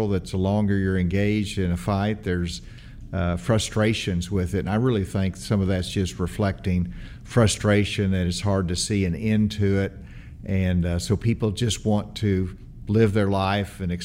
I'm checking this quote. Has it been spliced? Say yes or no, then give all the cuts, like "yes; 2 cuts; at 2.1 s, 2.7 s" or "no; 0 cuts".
no; 0 cuts